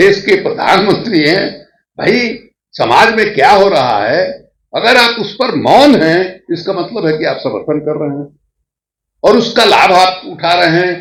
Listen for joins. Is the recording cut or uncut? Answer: uncut